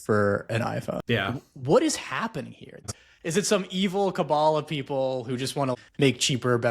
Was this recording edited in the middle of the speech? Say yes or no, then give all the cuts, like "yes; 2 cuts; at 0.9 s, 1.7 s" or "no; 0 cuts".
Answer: yes; 3 cuts; at 1.5 s, 2.9 s, 5.7 s